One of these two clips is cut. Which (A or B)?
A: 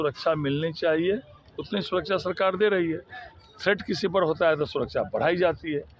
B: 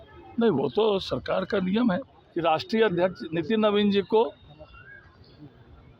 B